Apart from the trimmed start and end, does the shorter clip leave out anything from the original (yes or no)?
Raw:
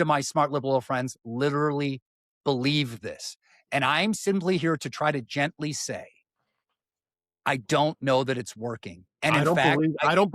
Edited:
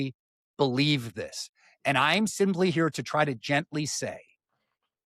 no